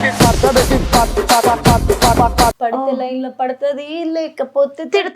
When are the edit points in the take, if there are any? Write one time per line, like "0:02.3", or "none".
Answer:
0:02.6